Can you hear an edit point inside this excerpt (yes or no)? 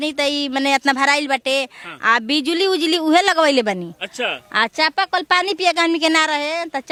no